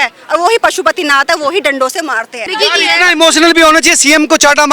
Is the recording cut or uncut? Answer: cut